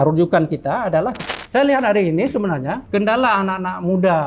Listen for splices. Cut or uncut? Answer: cut